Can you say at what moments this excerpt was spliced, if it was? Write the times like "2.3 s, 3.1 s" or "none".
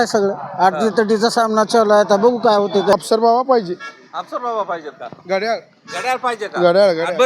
2.9 s